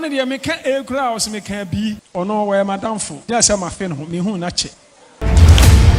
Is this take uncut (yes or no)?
yes